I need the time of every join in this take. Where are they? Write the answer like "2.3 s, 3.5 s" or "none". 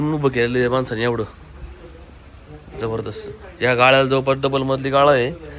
none